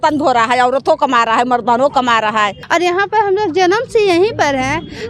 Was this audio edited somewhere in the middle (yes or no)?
yes